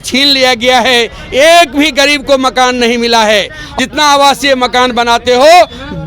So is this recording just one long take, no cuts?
no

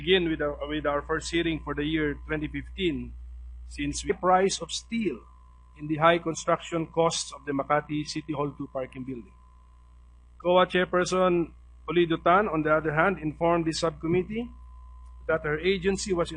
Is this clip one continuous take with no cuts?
yes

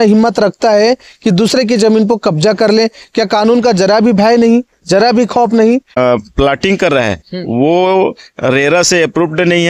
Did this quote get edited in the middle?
yes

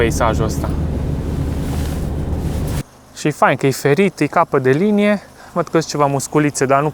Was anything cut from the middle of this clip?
yes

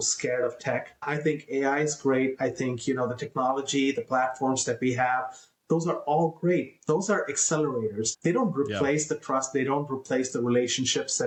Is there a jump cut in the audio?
no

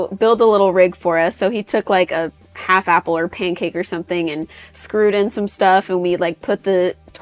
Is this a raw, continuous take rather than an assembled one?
yes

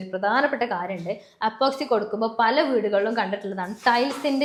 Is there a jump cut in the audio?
no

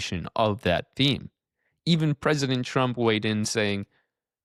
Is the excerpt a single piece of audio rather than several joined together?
yes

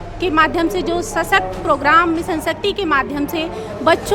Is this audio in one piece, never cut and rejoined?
yes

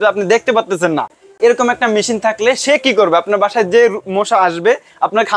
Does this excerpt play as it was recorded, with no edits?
yes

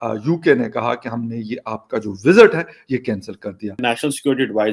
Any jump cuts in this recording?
yes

